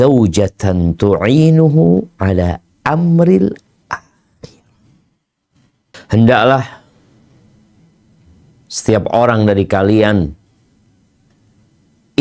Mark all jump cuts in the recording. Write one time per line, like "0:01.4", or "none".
0:06.0